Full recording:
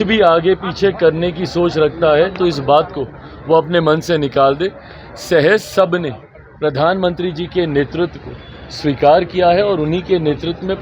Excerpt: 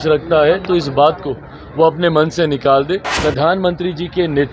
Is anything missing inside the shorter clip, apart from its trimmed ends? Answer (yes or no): yes